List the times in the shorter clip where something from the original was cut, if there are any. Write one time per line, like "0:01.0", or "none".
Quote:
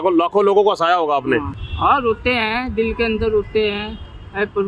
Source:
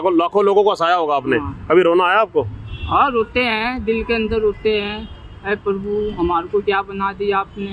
0:01.5